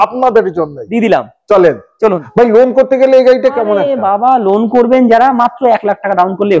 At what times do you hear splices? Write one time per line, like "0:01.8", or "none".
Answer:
0:02.2